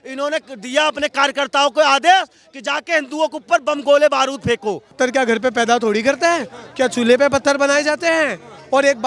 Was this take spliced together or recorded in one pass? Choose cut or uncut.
cut